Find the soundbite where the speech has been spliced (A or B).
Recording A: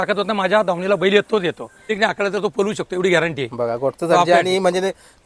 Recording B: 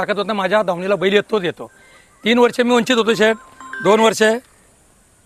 A